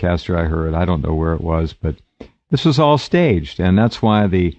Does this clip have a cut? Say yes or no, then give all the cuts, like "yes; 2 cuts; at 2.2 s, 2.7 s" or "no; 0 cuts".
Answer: yes; 1 cut; at 3.3 s